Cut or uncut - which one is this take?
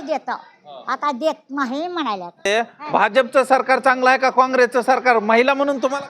cut